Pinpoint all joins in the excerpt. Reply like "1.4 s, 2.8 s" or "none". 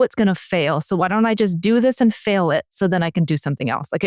none